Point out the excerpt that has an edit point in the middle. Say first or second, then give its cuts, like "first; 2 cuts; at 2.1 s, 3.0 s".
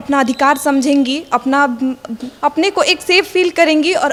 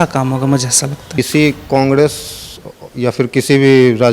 second; 1 cut; at 1.2 s